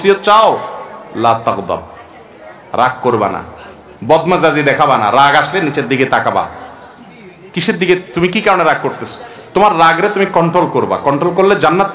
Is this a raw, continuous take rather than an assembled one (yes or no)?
yes